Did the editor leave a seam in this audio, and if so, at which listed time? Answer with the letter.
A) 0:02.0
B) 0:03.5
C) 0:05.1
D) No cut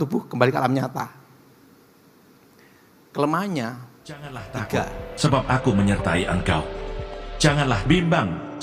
C